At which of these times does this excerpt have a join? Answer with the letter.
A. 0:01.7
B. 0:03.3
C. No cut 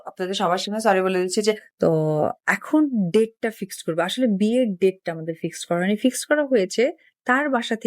A